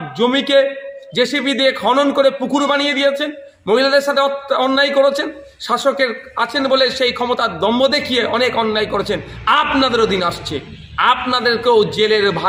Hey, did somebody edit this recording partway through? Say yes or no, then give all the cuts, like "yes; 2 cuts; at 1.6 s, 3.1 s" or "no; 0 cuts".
no; 0 cuts